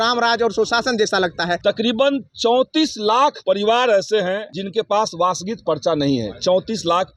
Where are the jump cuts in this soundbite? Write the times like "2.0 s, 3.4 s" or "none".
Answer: 1.6 s, 3.4 s, 4.6 s